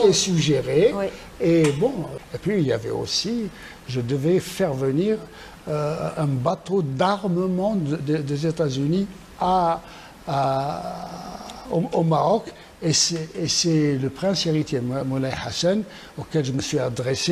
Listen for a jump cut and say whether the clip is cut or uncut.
cut